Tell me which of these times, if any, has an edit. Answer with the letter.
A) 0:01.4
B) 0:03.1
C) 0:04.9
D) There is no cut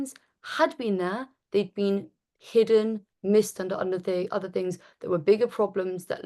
B